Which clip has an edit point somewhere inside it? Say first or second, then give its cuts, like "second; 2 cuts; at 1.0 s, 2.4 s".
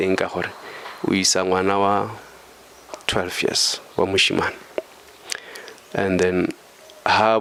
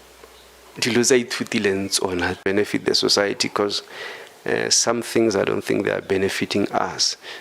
second; 1 cut; at 2.4 s